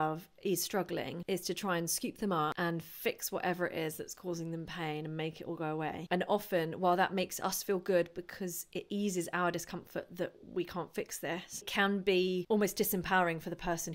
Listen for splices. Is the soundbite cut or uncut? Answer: cut